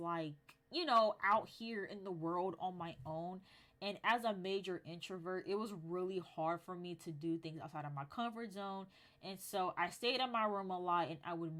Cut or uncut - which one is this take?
uncut